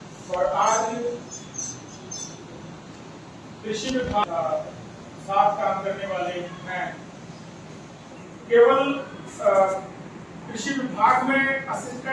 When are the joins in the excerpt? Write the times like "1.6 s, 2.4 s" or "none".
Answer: 1.8 s